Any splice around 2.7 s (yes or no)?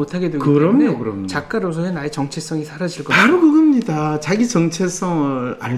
no